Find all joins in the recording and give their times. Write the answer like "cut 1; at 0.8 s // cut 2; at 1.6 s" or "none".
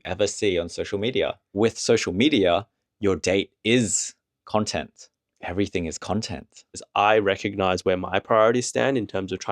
cut 1; at 1.5 s // cut 2; at 6.8 s